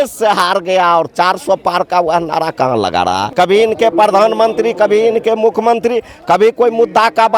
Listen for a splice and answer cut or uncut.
cut